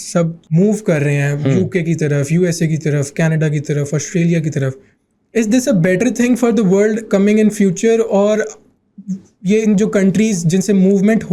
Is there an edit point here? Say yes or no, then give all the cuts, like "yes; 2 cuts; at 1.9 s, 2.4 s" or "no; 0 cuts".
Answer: no; 0 cuts